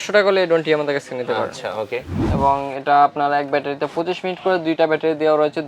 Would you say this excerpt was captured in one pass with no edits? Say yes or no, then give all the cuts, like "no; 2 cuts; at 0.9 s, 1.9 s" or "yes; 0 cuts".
no; 1 cut; at 2.3 s